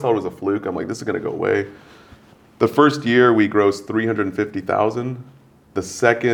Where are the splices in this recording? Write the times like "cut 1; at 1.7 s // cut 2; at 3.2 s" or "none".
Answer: none

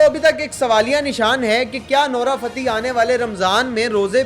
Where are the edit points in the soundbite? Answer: none

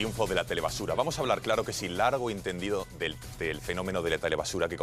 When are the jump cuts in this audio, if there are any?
none

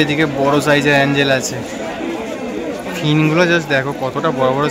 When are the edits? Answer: none

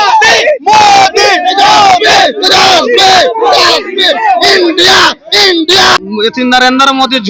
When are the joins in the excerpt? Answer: cut 1; at 6.0 s

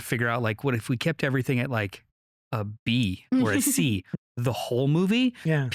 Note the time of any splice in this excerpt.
none

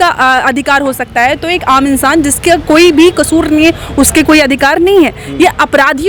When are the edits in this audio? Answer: none

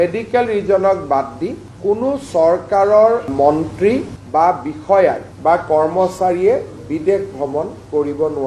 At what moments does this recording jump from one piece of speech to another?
none

